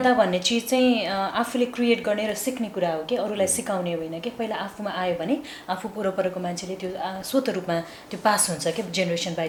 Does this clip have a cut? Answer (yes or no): no